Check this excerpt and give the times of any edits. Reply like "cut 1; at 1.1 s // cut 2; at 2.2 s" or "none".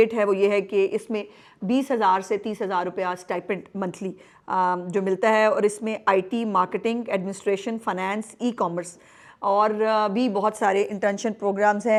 none